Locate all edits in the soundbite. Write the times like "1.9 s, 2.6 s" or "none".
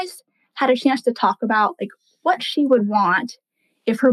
none